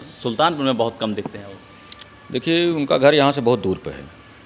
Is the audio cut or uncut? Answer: uncut